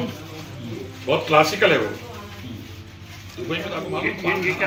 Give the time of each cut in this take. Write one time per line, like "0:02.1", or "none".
none